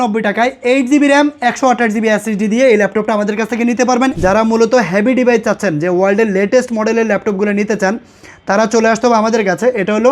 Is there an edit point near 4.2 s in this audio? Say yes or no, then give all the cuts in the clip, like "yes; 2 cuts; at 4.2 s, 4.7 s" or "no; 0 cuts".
yes; 1 cut; at 4.2 s